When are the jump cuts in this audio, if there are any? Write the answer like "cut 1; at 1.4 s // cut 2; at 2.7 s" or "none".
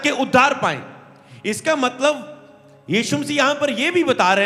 none